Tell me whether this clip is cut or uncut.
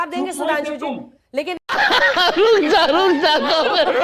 uncut